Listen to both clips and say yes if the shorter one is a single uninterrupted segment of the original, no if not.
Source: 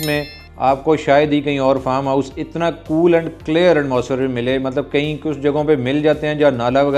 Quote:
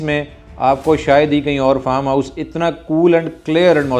yes